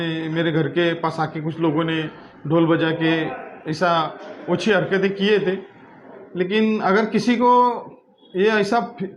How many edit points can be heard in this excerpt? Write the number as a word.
one